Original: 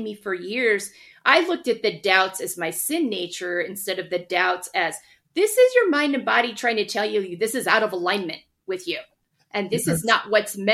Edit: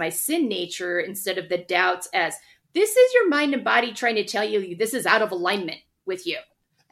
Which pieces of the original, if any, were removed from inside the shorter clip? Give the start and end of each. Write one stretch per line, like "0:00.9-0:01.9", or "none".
none